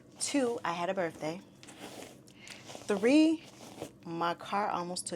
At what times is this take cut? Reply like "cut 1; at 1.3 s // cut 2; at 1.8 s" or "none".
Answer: none